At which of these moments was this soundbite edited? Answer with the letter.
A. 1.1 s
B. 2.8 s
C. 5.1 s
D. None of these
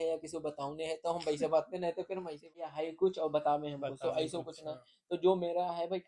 B